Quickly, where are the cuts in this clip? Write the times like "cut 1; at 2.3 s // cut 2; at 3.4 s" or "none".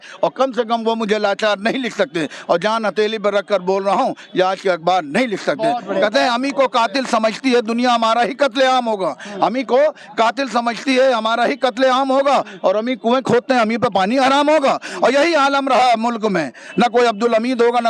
none